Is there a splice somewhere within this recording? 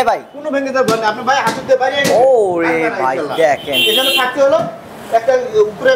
no; 0 cuts

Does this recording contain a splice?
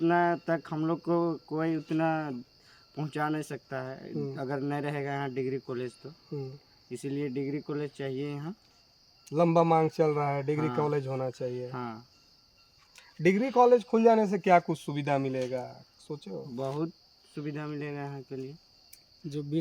no; 0 cuts

